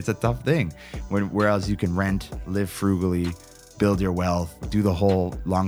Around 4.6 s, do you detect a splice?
yes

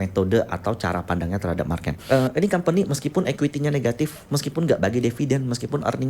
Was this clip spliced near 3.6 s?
no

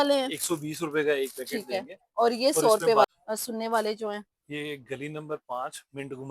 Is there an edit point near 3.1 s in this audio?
yes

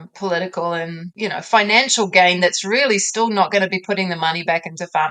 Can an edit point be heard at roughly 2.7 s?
no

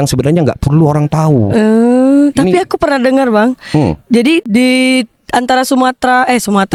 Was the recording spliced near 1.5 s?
no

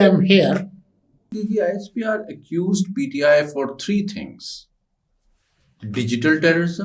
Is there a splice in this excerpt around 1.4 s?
yes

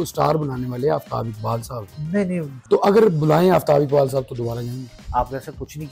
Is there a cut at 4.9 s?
yes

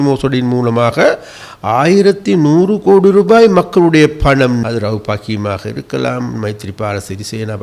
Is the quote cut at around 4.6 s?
yes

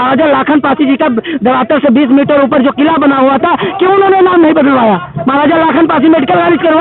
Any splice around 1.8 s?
no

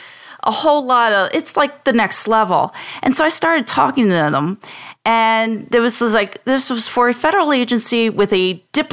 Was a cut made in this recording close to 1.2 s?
no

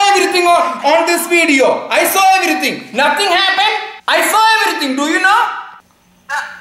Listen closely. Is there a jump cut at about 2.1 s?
no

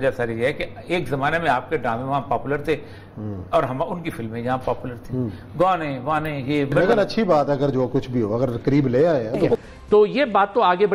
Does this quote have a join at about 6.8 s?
yes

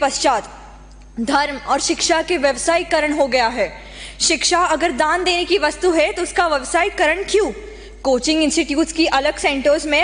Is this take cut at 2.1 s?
no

